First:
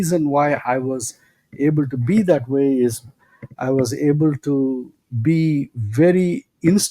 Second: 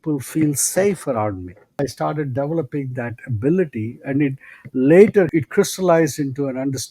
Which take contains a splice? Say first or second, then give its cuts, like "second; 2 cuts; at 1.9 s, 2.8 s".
second; 2 cuts; at 1.8 s, 5.3 s